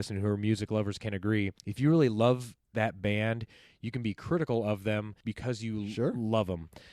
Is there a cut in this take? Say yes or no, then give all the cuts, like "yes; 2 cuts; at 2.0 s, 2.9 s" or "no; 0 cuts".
yes; 2 cuts; at 1.6 s, 5.2 s